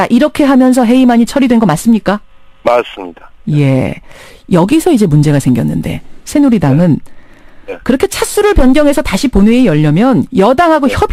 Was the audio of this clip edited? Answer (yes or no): no